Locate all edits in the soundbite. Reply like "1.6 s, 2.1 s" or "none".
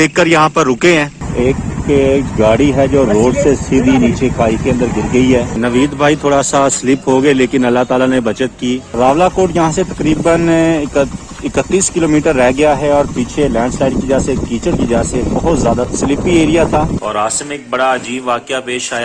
1.2 s, 5.5 s, 8.9 s, 15.9 s, 17.0 s